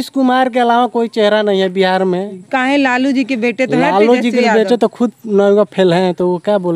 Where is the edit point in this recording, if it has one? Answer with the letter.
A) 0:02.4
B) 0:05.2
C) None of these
A